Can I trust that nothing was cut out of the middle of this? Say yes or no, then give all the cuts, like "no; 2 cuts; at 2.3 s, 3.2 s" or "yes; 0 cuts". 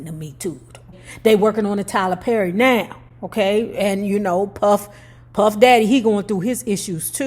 no; 1 cut; at 0.9 s